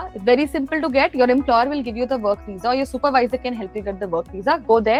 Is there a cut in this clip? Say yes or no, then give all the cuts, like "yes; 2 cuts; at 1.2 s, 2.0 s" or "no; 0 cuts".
no; 0 cuts